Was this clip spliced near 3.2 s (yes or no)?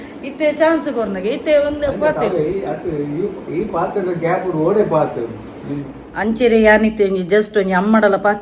no